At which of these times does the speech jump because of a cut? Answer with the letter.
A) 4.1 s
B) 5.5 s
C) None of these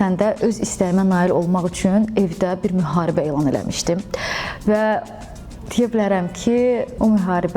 C